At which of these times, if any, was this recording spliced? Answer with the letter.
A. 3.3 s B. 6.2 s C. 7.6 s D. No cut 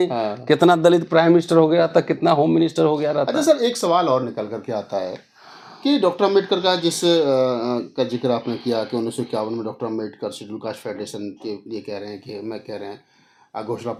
D